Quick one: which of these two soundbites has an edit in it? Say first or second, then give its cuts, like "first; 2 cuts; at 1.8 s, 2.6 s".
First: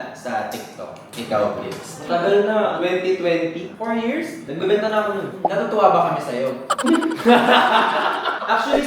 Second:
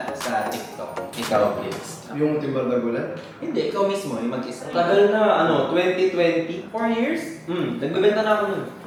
first; 4 cuts; at 1.9 s, 2.7 s, 4.5 s, 5.3 s